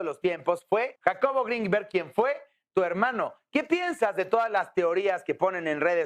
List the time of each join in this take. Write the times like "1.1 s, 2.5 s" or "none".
none